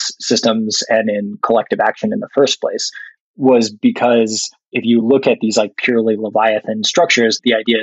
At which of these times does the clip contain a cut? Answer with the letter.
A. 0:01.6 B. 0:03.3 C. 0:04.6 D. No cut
D